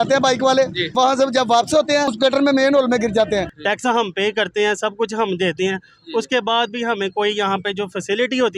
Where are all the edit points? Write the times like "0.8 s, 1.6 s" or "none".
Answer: 0.9 s, 2.1 s, 3.5 s